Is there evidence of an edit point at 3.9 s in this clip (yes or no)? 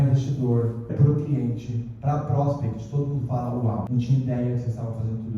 yes